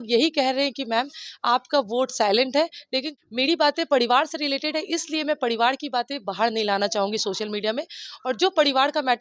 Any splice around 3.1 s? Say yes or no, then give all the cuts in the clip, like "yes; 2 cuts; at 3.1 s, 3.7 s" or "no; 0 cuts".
yes; 1 cut; at 3.1 s